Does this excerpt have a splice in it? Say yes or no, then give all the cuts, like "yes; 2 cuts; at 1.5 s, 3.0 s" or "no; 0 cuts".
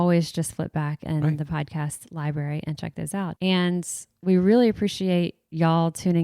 yes; 1 cut; at 3.3 s